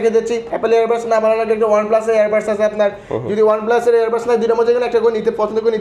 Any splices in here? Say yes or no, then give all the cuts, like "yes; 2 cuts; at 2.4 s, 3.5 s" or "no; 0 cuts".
no; 0 cuts